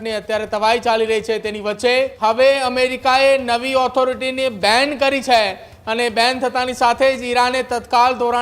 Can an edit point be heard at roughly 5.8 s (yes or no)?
no